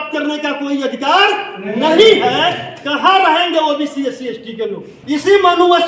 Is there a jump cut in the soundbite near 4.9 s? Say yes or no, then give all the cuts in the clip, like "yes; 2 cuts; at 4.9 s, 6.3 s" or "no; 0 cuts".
yes; 1 cut; at 4.9 s